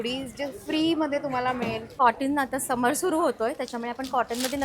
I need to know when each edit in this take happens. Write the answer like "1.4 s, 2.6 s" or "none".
1.9 s